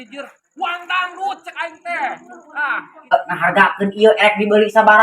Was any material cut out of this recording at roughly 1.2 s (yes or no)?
no